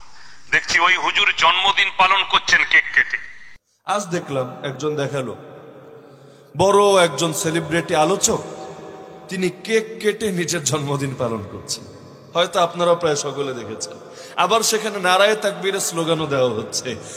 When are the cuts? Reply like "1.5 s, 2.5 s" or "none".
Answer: 3.7 s

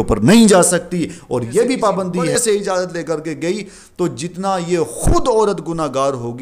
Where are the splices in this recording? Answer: 2.3 s

